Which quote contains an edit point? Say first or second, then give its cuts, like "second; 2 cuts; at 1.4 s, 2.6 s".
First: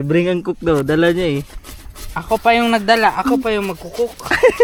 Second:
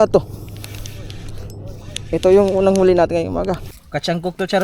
second; 1 cut; at 3.7 s